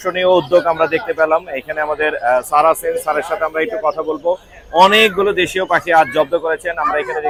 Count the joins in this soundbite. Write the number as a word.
zero